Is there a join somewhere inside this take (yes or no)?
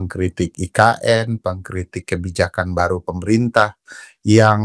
no